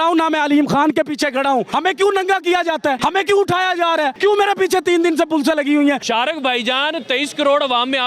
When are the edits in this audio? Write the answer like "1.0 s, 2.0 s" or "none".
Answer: 1.7 s, 3.0 s, 4.1 s, 6.0 s